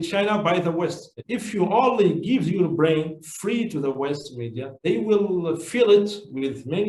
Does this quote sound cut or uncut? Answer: cut